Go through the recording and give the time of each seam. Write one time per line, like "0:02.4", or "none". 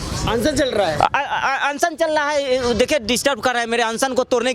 none